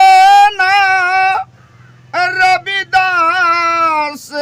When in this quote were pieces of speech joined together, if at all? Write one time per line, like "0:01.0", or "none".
none